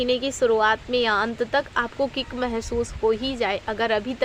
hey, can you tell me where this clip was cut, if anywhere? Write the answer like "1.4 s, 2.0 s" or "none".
none

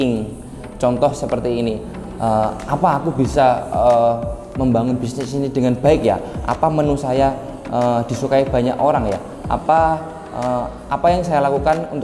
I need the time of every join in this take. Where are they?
none

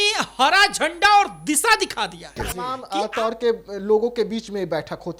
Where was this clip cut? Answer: 2.7 s

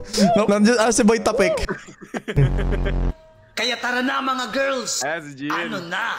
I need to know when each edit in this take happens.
1.6 s

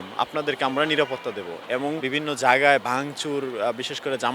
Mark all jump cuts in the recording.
2.0 s

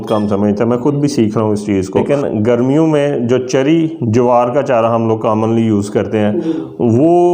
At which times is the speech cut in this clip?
2.0 s

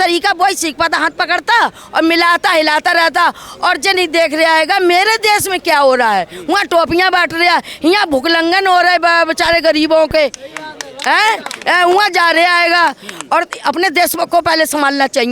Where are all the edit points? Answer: none

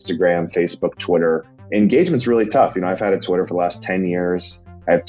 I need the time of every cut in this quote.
1.7 s

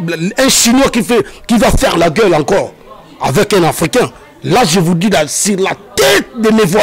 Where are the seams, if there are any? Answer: none

